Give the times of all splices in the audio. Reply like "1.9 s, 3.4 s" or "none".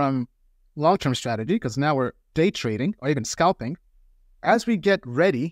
4.3 s